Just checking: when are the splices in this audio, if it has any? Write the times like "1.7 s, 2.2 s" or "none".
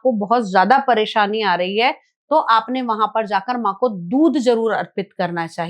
none